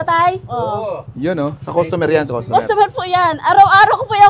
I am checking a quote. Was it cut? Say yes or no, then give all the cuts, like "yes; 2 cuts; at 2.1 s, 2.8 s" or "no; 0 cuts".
no; 0 cuts